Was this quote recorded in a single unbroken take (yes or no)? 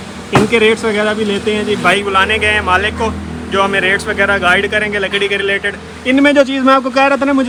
yes